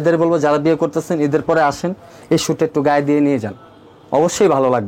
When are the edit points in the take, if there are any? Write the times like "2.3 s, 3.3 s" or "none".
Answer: none